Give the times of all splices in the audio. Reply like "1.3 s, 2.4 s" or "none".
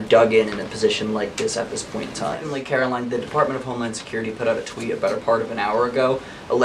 2.4 s